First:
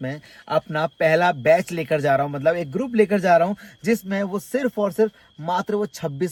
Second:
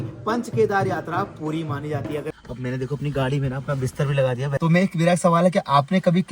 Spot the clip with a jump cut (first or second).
second